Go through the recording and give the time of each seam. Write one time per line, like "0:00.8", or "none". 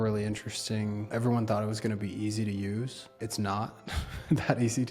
0:01.1
0:03.0